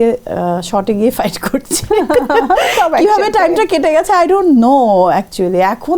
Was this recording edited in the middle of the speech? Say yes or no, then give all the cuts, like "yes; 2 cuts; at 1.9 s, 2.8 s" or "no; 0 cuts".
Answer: no; 0 cuts